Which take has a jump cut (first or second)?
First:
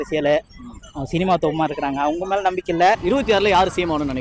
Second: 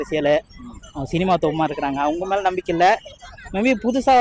first